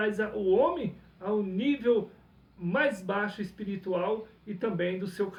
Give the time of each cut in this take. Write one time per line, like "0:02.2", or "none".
none